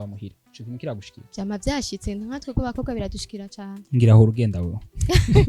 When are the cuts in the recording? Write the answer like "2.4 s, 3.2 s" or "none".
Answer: 1.2 s